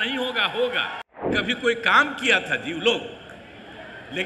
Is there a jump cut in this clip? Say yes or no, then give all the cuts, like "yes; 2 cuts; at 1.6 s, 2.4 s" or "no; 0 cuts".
yes; 1 cut; at 1.3 s